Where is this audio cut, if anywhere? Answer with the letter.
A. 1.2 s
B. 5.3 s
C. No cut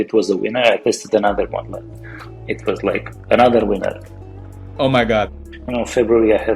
B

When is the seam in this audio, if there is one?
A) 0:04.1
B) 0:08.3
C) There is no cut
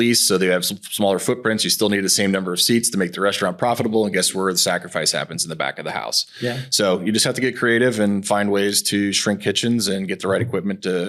C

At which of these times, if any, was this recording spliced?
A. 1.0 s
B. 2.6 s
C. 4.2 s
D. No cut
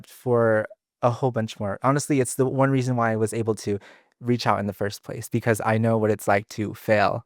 D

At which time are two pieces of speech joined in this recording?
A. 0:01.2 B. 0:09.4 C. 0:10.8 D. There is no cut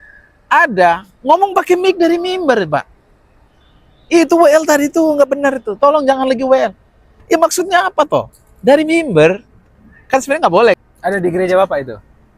C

